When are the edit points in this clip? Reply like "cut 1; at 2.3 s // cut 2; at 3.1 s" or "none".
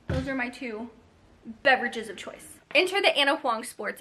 cut 1; at 2.5 s

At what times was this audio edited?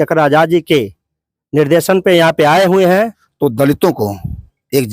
cut 1; at 3.2 s

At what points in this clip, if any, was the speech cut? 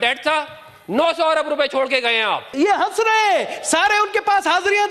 cut 1; at 2.5 s

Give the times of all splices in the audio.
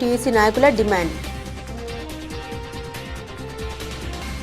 cut 1; at 2.1 s // cut 2; at 3.4 s

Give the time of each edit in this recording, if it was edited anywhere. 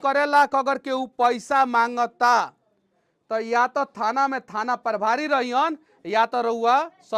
none

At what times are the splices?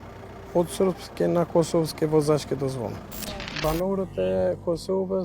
cut 1; at 3.5 s

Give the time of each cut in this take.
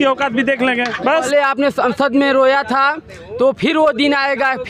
cut 1; at 1.3 s

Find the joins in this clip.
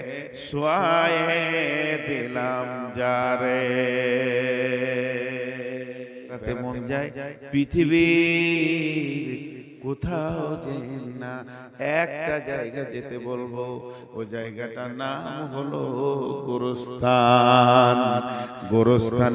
cut 1; at 6.4 s

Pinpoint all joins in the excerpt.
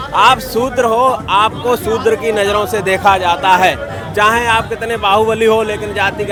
none

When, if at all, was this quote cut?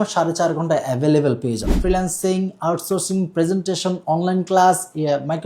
cut 1; at 1.7 s

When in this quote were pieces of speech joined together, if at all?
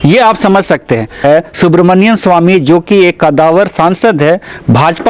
cut 1; at 1.2 s

